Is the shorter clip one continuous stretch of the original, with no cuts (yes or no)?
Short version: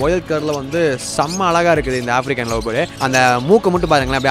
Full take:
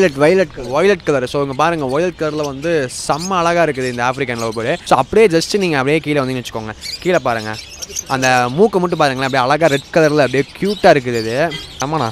no